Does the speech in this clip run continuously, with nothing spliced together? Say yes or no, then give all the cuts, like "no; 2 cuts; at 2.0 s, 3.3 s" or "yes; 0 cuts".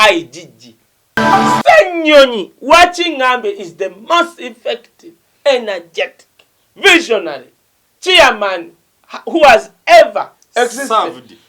no; 1 cut; at 1.0 s